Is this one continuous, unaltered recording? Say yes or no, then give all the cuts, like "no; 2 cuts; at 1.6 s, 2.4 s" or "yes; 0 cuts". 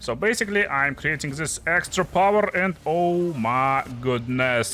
yes; 0 cuts